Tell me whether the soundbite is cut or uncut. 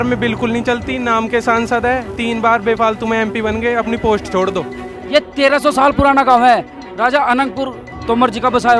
cut